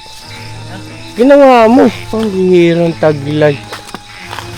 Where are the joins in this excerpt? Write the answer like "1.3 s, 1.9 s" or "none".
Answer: 2.0 s